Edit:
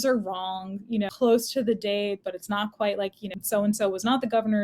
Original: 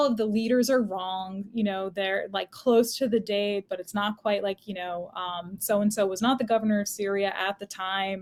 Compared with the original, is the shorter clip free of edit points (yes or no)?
no